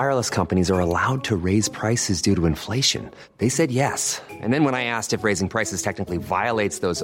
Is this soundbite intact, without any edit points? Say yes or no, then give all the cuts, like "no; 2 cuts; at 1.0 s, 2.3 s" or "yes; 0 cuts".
yes; 0 cuts